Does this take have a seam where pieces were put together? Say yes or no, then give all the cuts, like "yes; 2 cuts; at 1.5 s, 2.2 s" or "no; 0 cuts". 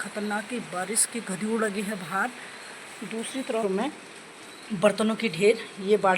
yes; 1 cut; at 3.6 s